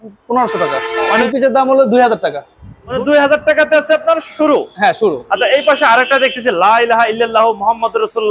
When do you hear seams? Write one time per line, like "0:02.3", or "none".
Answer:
0:01.2
0:02.9